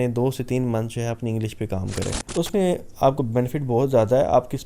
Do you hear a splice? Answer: yes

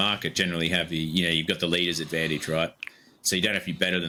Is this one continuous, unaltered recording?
yes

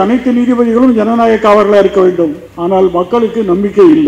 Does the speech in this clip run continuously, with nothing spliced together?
no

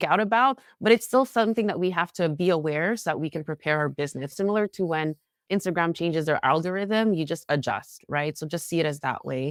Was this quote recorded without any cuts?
yes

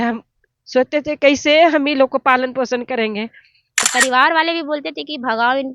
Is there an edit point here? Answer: yes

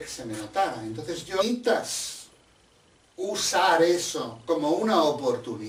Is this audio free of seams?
yes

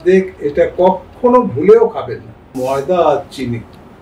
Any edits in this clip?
yes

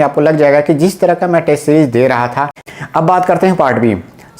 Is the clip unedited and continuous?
no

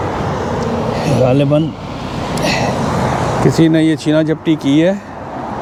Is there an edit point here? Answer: no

